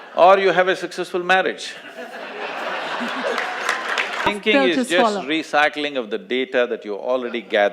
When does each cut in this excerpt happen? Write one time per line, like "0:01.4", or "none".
0:04.3